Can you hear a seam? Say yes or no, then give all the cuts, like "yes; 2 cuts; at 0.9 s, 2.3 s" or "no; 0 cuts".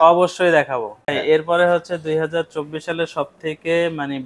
yes; 1 cut; at 1.1 s